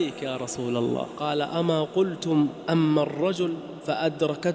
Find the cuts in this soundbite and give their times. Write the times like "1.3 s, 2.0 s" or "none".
1.1 s